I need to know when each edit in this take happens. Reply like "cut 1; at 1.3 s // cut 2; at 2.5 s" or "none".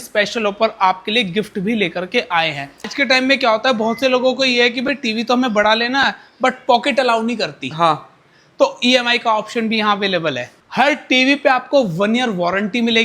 cut 1; at 2.8 s // cut 2; at 10.5 s

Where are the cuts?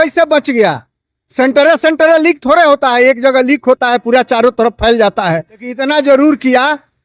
cut 1; at 5.8 s

